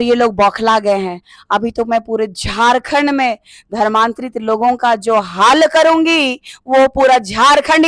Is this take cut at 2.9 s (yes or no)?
no